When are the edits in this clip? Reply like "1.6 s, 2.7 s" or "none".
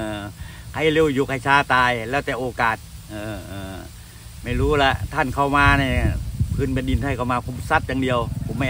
none